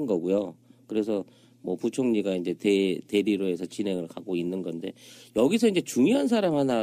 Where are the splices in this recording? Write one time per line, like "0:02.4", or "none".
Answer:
0:04.9